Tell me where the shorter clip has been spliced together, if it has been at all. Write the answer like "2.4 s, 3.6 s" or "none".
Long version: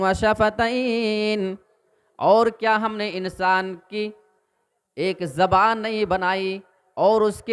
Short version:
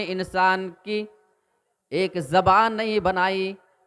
none